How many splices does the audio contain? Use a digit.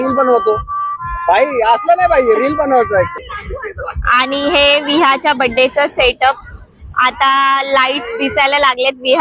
1